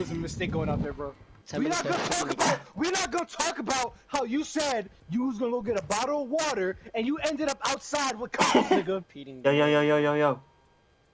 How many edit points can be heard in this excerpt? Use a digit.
3